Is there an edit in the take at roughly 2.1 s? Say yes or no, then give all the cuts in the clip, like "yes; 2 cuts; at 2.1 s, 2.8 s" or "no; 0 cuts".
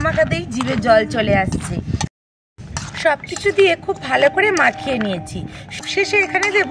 yes; 2 cuts; at 2.1 s, 5.8 s